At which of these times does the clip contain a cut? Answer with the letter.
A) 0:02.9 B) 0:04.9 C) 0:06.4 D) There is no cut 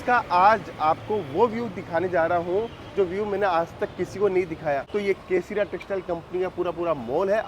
B